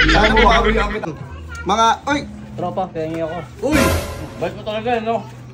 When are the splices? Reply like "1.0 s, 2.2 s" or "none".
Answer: 1.1 s